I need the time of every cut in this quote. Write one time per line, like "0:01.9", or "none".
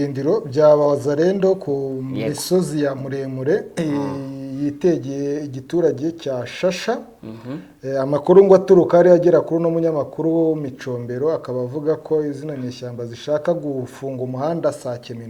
none